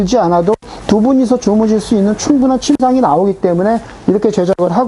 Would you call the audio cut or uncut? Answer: uncut